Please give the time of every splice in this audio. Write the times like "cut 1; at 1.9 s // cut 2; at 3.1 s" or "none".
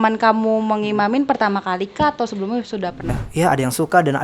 cut 1; at 3.2 s

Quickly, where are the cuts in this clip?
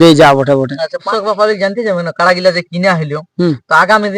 cut 1; at 1.1 s

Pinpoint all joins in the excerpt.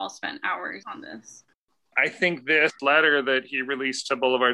cut 1; at 0.8 s // cut 2; at 1.9 s // cut 3; at 2.8 s

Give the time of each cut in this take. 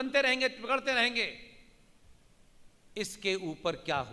none

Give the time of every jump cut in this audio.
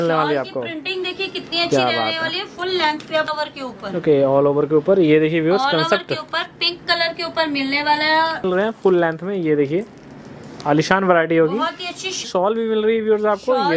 cut 1; at 3.3 s // cut 2; at 8.4 s // cut 3; at 12.3 s

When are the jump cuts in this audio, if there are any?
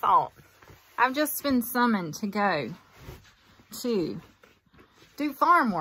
none

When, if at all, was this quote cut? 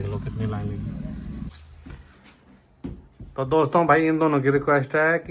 cut 1; at 1.5 s

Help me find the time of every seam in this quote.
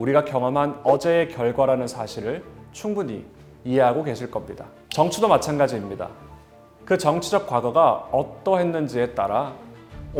none

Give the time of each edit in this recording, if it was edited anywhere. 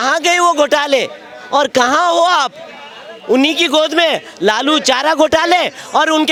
none

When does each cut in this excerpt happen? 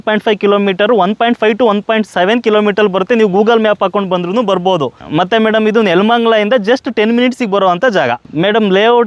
cut 1; at 5.0 s // cut 2; at 8.2 s

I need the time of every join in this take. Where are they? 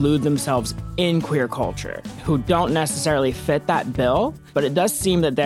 cut 1; at 2.1 s

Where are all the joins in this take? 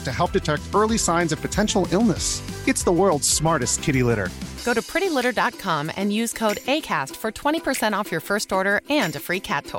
none

